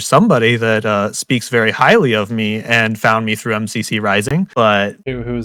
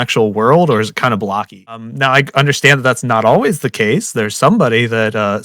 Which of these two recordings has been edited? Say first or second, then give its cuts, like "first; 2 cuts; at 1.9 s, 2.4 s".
second; 1 cut; at 1.9 s